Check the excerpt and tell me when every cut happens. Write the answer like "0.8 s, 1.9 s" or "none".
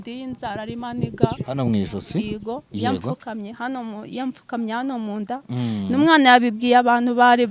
none